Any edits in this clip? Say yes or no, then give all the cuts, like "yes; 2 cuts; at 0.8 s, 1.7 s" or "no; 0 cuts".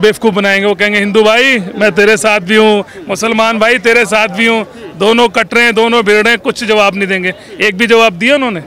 no; 0 cuts